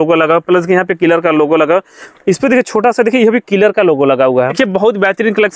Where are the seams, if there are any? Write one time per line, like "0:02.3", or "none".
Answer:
0:04.6